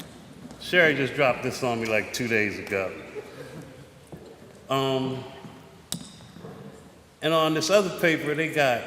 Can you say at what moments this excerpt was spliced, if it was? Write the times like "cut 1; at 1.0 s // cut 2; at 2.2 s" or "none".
cut 1; at 3.8 s